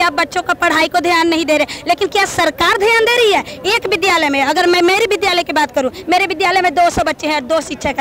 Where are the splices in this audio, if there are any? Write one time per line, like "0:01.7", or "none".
none